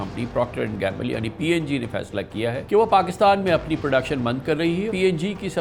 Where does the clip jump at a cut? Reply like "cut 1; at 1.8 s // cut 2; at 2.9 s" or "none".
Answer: cut 1; at 2.6 s // cut 2; at 4.9 s